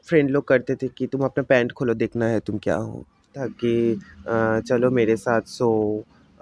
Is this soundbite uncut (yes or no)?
no